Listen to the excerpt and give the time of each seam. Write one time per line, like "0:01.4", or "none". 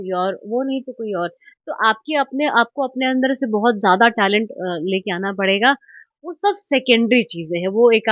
none